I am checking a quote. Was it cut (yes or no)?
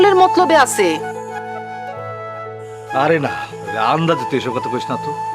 no